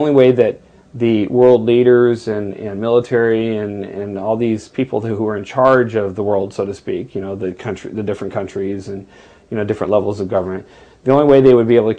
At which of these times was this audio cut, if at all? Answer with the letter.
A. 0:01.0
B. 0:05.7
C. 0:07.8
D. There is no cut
D